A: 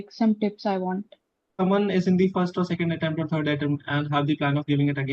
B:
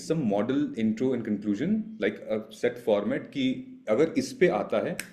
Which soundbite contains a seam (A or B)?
A